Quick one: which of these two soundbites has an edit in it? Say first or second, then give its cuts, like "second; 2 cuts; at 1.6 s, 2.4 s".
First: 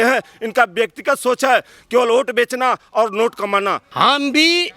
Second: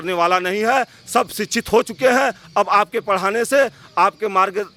first; 1 cut; at 3.8 s